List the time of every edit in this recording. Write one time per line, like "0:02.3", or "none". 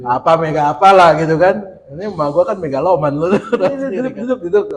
0:03.8